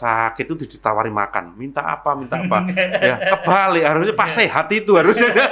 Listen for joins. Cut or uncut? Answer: uncut